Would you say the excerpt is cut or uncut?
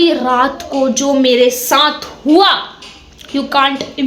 uncut